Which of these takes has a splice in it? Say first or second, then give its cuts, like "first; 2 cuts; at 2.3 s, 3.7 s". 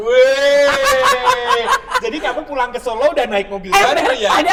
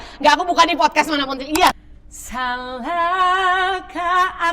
second; 1 cut; at 1.8 s